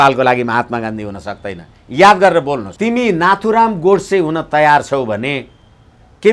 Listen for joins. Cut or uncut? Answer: cut